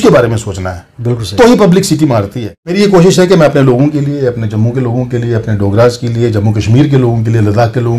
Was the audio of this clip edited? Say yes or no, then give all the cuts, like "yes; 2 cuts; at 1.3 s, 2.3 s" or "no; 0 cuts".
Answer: yes; 1 cut; at 2.7 s